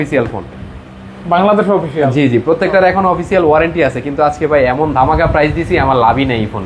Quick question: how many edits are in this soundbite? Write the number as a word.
zero